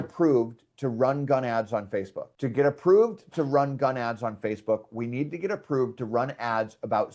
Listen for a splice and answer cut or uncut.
uncut